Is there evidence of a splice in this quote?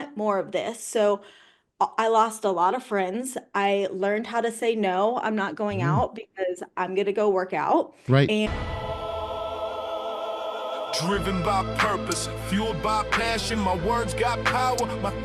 yes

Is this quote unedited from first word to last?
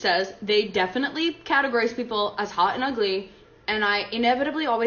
yes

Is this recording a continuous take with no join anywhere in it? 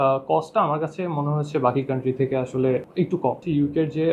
no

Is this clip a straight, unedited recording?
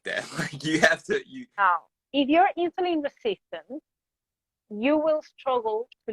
no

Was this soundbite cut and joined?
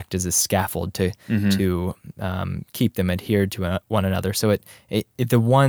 no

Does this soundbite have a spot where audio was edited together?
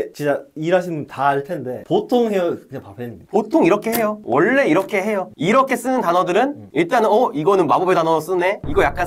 no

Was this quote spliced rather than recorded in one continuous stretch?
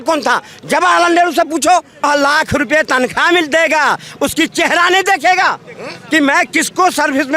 yes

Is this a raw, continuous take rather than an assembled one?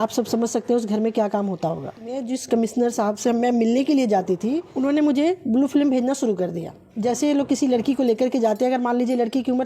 no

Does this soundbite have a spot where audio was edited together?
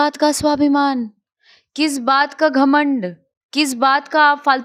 no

